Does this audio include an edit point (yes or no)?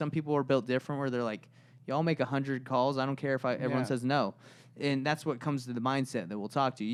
no